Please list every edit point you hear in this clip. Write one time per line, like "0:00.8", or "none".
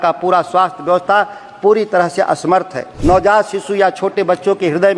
0:02.9